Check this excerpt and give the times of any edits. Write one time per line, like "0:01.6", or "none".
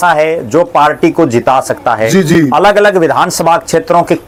none